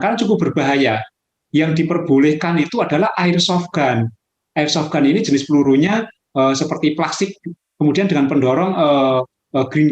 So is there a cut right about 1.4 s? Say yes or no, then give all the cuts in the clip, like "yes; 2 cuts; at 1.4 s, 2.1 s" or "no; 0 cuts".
yes; 1 cut; at 1.4 s